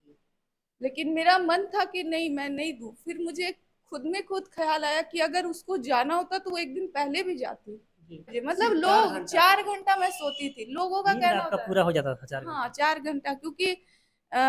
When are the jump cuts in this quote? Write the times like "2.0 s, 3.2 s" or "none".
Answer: 8.3 s